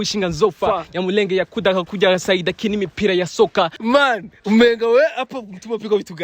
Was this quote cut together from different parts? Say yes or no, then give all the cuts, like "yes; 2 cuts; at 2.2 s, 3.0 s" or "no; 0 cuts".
yes; 1 cut; at 3.8 s